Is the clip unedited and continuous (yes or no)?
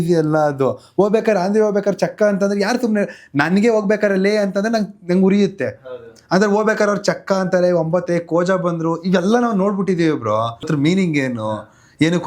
no